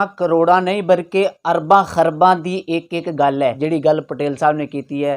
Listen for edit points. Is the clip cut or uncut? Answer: cut